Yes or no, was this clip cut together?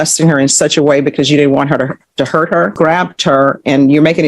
yes